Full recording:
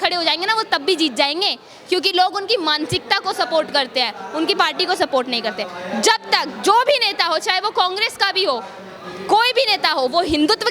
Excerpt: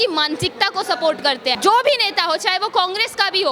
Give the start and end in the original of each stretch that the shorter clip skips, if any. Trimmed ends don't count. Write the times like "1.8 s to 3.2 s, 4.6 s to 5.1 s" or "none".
4.1 s to 6.6 s